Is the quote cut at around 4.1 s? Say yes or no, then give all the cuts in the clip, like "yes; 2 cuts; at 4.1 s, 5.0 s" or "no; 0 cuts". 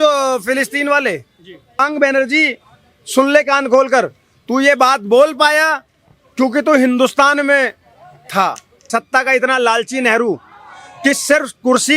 no; 2 cuts; at 1.8 s, 8.9 s